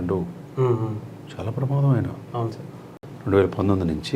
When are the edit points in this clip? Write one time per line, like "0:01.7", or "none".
0:03.1